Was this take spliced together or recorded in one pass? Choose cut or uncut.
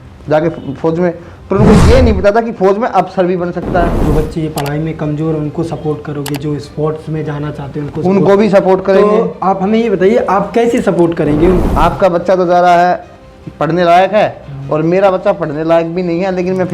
cut